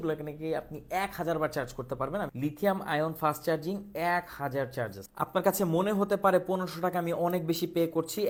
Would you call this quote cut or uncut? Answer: uncut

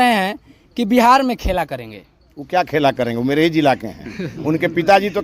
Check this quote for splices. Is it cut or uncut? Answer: uncut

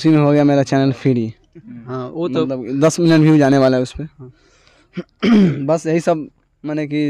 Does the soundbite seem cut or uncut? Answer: uncut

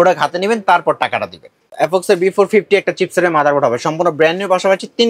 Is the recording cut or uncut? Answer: cut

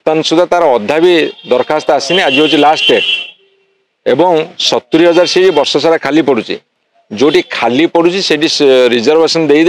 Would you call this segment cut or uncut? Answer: uncut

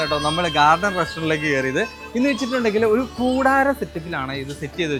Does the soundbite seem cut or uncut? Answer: uncut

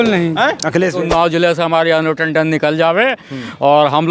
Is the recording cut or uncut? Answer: cut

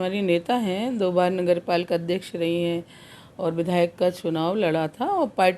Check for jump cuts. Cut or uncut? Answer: uncut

